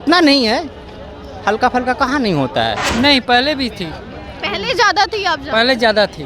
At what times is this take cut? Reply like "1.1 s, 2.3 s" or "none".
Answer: 2.8 s